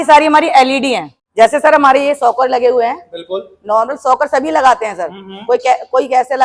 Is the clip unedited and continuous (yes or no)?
no